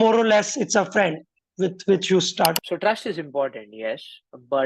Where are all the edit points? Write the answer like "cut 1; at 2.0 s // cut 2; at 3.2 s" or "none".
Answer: cut 1; at 2.5 s